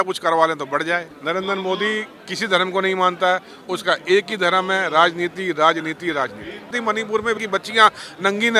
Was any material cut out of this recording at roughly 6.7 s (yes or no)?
yes